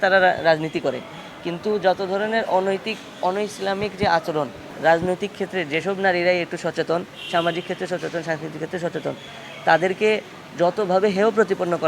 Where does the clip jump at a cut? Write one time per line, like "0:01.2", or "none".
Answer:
0:04.6